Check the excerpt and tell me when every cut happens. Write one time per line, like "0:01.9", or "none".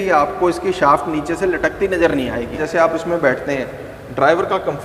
0:02.5

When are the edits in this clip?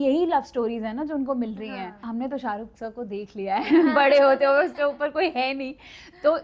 0:02.0

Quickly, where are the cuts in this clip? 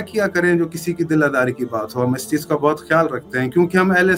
none

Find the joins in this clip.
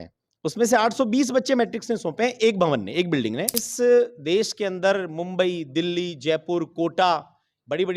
0:03.6

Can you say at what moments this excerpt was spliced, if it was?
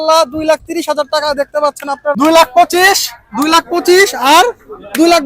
0:02.2

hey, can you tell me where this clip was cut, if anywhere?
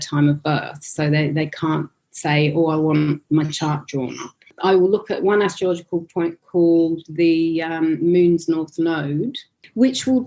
0:04.5

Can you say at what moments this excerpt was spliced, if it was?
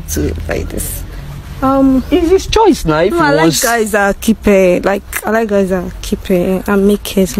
none

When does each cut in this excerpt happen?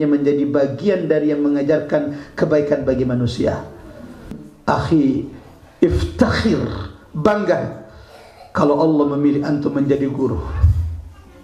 0:04.5

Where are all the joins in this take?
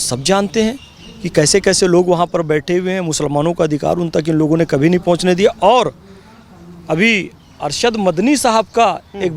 none

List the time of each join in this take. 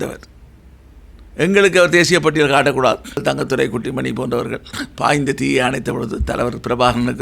0:03.2

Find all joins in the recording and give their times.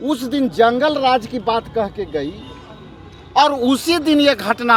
none

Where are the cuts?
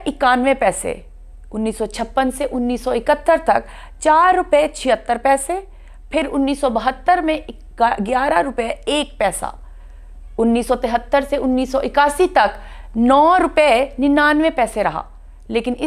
none

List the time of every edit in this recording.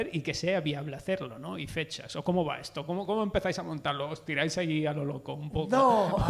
none

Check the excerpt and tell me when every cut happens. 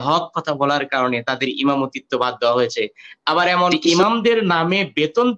0:03.8

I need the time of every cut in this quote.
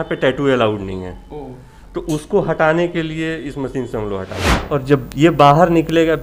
0:04.5

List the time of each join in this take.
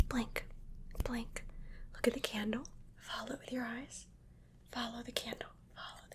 none

